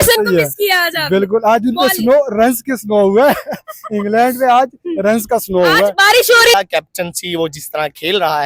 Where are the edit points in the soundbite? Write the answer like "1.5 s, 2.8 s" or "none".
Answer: 6.5 s